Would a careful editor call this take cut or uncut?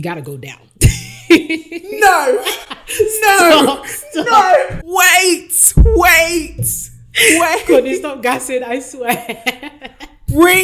uncut